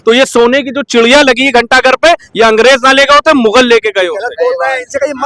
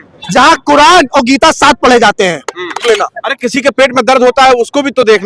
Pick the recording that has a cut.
second; 1 cut; at 2.8 s

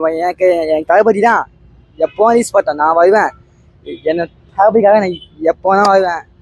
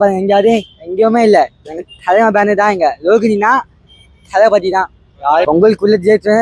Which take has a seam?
second; 1 cut; at 5.5 s

